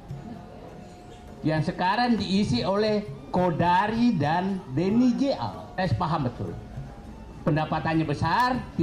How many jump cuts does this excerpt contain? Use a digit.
1